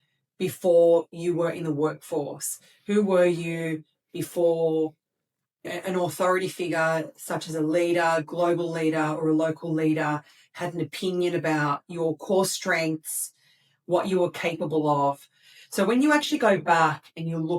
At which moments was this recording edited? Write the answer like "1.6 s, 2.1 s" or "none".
5.7 s